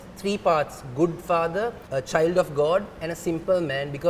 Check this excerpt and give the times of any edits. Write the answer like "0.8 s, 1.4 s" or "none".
1.8 s